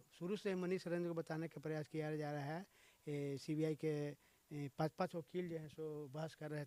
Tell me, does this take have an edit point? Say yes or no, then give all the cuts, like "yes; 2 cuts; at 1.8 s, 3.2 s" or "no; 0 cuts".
no; 0 cuts